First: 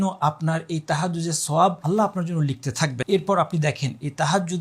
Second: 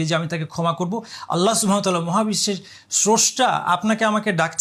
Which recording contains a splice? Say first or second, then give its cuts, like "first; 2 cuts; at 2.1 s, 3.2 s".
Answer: first; 2 cuts; at 1.8 s, 3.0 s